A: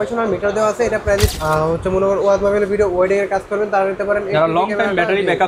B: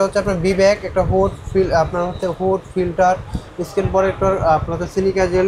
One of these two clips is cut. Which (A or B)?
A